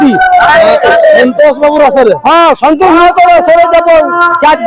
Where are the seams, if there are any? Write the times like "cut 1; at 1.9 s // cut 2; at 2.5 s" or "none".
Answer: none